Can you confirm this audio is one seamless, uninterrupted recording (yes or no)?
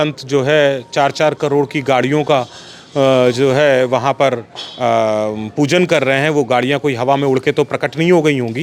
yes